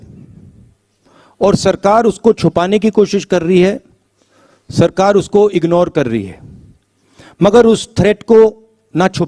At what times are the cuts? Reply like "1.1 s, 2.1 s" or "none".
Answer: none